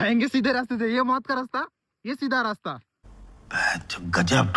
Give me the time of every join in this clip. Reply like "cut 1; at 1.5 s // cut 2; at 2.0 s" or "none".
none